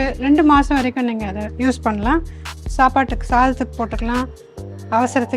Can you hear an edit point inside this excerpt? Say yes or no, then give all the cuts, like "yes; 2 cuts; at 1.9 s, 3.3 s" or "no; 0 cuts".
no; 0 cuts